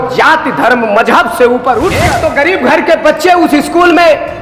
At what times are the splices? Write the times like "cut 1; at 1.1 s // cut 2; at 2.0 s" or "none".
cut 1; at 2.1 s